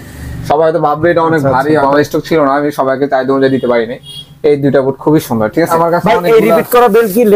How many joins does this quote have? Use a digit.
2